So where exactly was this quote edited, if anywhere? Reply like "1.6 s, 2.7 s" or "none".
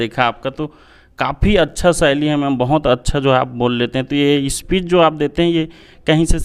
none